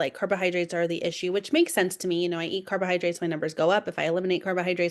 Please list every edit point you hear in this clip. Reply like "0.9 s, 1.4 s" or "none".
none